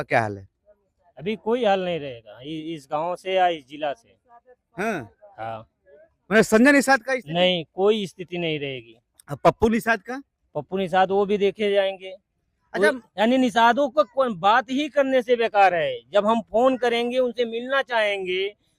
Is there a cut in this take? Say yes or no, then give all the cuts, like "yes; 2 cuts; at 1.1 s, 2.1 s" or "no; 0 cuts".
no; 0 cuts